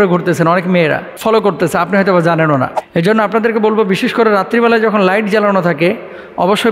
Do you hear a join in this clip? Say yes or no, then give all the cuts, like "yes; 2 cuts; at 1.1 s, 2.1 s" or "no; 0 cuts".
yes; 2 cuts; at 1.1 s, 2.8 s